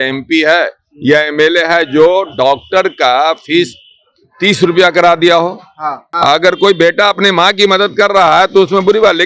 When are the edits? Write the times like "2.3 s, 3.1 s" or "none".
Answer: 6.1 s